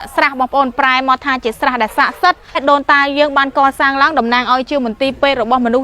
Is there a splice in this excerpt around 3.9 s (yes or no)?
no